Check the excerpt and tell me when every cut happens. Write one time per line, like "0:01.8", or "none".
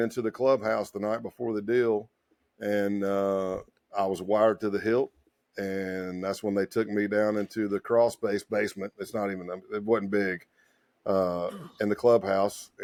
none